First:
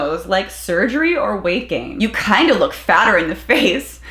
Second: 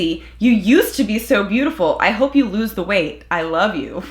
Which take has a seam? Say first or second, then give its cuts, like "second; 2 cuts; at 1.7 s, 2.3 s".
first; 1 cut; at 2.0 s